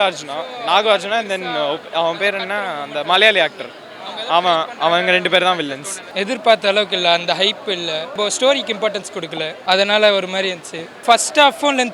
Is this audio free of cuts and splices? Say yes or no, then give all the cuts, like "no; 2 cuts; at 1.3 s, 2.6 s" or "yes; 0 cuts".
no; 4 cuts; at 6.0 s, 8.1 s, 9.5 s, 11.0 s